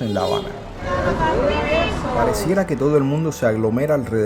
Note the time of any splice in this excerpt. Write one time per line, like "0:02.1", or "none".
0:00.9
0:02.4

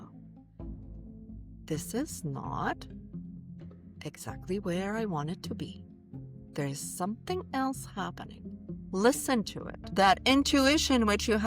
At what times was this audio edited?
0:09.9

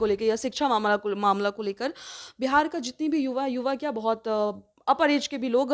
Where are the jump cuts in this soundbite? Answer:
none

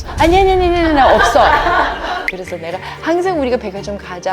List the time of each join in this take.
0:02.3

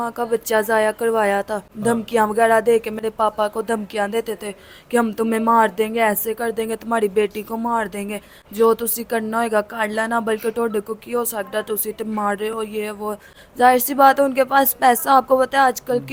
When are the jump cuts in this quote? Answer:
none

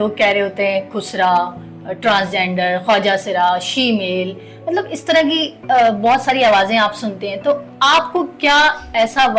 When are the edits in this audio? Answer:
none

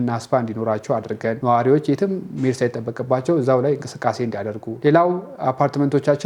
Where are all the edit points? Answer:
none

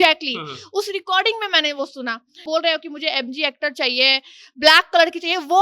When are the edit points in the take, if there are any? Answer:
0:02.4

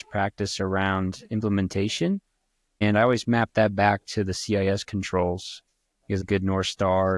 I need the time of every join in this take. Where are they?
0:02.8
0:06.2

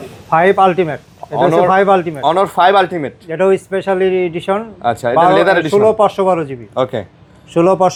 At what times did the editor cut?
none

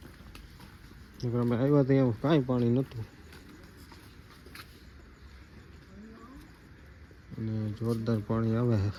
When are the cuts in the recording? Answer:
none

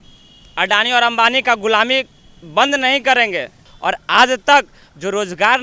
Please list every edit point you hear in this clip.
0:03.7

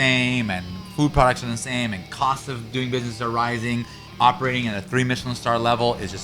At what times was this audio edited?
0:04.0

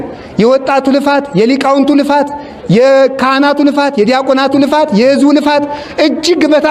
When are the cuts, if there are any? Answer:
none

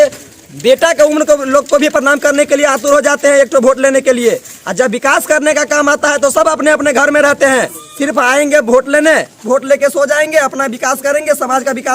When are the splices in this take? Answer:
0:07.8
0:09.4

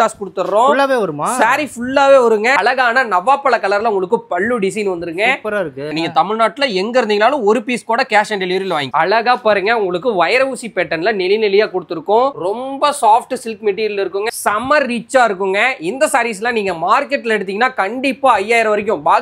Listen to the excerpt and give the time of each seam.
0:02.6
0:05.9
0:08.9
0:14.3

